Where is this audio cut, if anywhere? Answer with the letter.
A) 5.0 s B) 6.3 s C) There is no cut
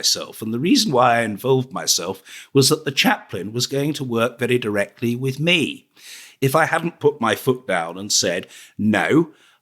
B